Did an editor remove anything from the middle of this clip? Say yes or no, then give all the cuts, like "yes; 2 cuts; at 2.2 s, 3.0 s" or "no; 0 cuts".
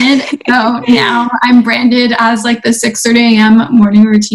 no; 0 cuts